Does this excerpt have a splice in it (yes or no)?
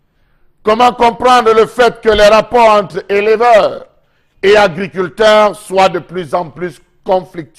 no